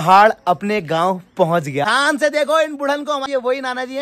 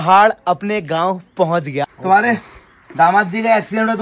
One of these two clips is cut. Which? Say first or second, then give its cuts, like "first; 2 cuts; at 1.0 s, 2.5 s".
first; 2 cuts; at 1.9 s, 3.3 s